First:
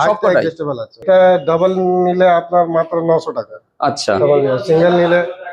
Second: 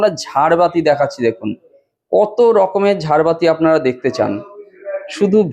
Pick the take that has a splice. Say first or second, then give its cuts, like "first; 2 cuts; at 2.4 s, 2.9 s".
first; 1 cut; at 1.0 s